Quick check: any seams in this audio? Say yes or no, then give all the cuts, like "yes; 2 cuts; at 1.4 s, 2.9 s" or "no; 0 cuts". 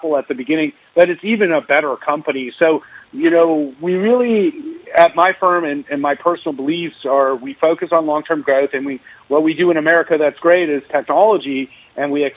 no; 0 cuts